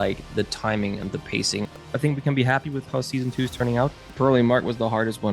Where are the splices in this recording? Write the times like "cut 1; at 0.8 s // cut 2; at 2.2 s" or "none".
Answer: cut 1; at 1.9 s // cut 2; at 4.1 s